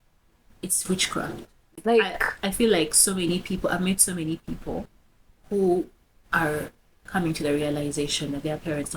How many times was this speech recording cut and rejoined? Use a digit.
1